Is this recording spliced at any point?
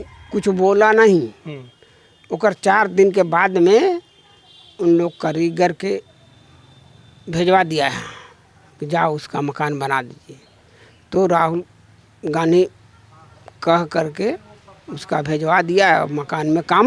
no; 0 cuts

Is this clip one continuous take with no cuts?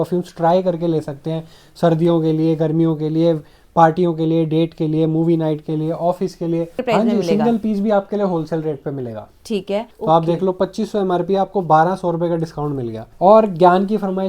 no; 3 cuts; at 6.8 s, 9.9 s, 13.1 s

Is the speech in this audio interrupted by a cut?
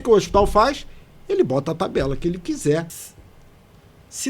yes; 1 cut; at 3.0 s

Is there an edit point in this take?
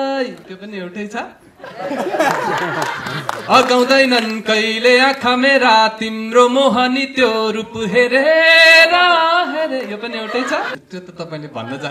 yes; 1 cut; at 10.7 s

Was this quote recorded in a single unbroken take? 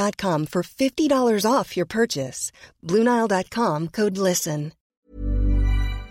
no; 1 cut; at 5.1 s

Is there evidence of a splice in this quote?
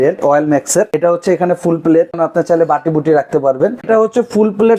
yes; 3 cuts; at 0.9 s, 2.1 s, 3.9 s

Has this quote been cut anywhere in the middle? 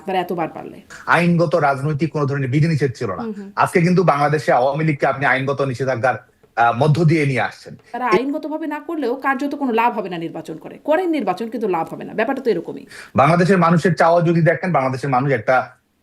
yes; 3 cuts; at 0.9 s, 8.2 s, 13.0 s

